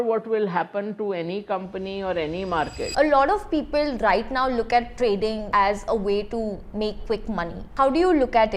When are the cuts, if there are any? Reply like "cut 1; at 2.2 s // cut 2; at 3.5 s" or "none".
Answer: cut 1; at 2.8 s // cut 2; at 5.4 s // cut 3; at 7.7 s